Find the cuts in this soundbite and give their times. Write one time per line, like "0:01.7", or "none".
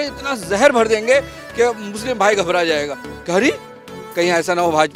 none